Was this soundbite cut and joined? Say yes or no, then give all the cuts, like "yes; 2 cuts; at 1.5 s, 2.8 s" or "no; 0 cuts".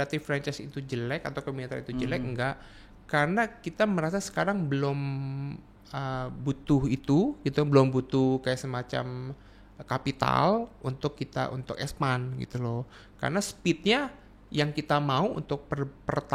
no; 0 cuts